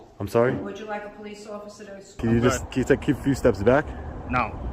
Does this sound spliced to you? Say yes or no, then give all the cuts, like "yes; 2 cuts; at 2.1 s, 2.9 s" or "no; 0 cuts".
yes; 1 cut; at 2.2 s